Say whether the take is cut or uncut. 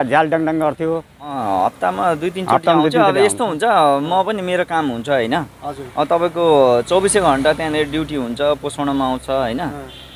cut